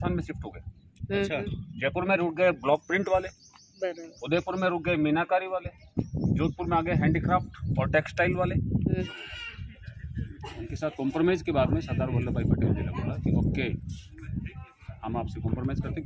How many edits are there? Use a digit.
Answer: 1